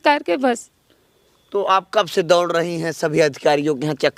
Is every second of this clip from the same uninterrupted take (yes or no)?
yes